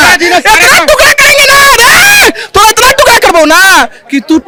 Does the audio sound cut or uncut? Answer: uncut